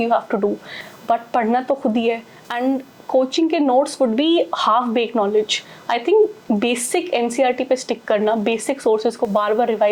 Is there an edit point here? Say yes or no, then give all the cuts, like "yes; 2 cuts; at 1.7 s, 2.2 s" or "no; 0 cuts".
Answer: no; 0 cuts